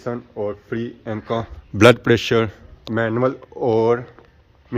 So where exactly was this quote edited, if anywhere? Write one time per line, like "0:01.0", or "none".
none